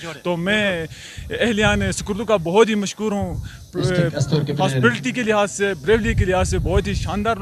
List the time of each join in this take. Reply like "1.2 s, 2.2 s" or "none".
none